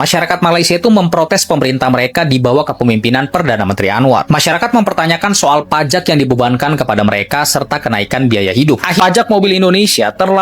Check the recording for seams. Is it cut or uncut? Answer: cut